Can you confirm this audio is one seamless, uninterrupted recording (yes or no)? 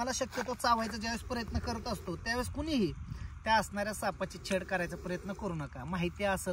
yes